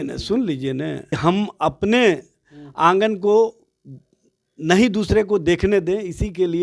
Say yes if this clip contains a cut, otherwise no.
yes